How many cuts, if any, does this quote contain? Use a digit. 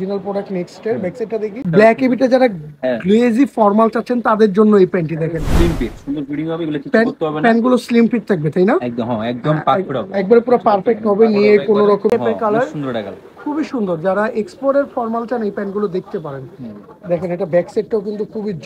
2